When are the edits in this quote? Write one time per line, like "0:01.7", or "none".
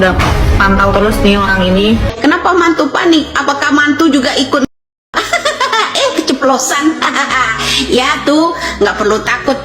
0:02.1